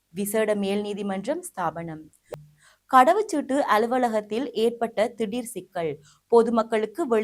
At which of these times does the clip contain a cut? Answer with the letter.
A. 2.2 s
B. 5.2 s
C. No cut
A